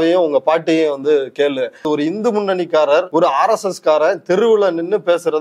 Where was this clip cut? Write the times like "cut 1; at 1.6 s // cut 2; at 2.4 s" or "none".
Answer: cut 1; at 1.8 s // cut 2; at 3.1 s